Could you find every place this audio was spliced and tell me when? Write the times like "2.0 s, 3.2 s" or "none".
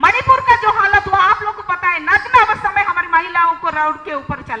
none